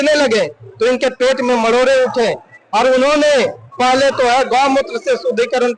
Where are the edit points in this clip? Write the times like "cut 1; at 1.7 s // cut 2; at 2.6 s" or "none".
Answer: none